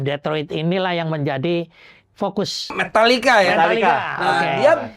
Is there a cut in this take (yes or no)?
yes